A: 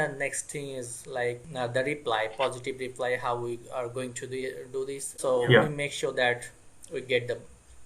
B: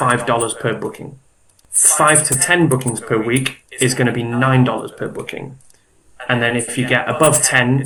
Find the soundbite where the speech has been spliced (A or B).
A